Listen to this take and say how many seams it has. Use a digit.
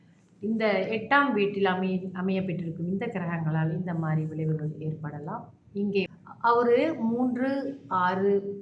1